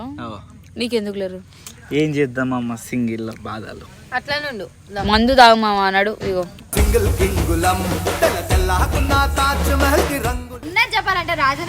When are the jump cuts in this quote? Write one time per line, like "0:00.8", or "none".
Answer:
0:10.6